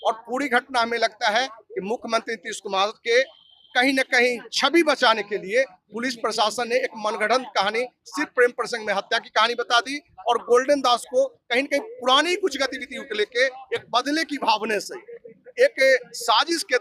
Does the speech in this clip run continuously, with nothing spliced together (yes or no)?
yes